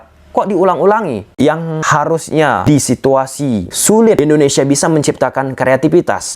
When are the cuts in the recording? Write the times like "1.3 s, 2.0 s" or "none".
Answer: 1.3 s, 2.6 s, 4.2 s